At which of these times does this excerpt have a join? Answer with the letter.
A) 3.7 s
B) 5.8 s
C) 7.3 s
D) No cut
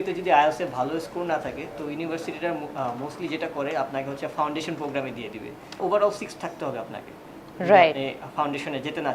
B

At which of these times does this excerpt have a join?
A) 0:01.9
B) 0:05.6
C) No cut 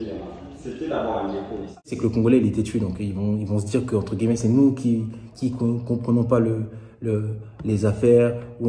A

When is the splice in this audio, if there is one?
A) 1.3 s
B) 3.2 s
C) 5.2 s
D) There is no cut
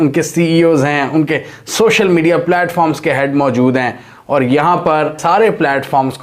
C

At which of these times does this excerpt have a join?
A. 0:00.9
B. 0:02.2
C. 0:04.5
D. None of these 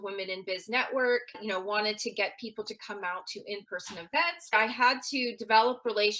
C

